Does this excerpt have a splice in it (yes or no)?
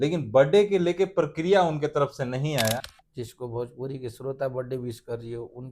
yes